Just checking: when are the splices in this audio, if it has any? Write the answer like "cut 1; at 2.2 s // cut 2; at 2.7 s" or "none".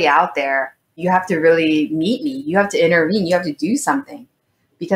cut 1; at 1.0 s